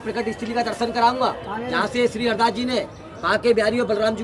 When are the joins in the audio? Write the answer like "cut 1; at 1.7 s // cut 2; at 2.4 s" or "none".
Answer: none